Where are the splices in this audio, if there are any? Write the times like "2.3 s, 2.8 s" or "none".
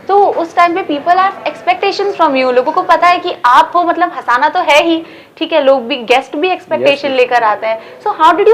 none